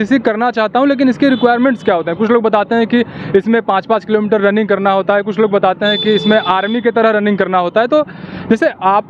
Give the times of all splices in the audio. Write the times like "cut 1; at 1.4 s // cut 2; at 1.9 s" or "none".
none